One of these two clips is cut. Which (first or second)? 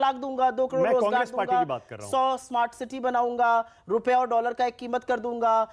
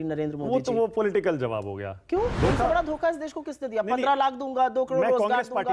second